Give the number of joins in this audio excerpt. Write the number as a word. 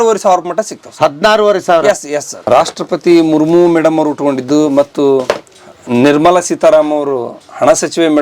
one